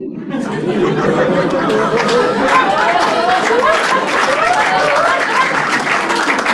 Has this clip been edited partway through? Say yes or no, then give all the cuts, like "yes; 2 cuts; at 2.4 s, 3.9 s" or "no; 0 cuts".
no; 0 cuts